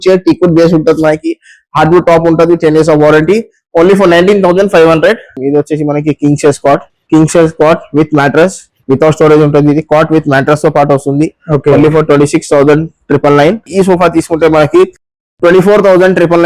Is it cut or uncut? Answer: cut